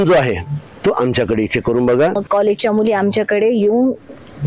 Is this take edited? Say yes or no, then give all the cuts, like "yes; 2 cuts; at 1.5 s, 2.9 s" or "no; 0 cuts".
yes; 1 cut; at 2.2 s